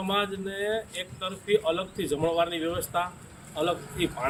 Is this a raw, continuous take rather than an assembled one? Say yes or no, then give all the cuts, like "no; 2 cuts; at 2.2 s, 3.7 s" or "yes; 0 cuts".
yes; 0 cuts